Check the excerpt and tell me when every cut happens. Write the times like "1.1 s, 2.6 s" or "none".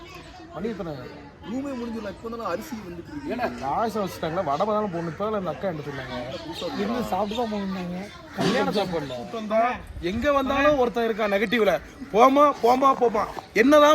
9.3 s